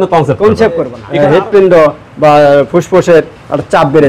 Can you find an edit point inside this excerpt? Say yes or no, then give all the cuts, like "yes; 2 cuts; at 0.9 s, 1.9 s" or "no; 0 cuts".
yes; 1 cut; at 1.0 s